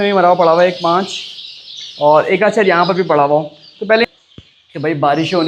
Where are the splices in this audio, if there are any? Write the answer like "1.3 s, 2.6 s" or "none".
4.1 s